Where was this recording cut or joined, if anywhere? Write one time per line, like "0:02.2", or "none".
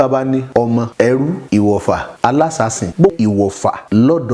0:03.1